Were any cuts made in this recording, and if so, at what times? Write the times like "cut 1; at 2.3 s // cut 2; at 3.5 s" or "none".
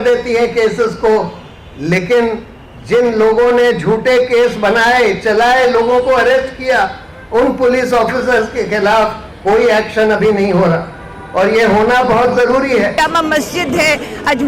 cut 1; at 12.9 s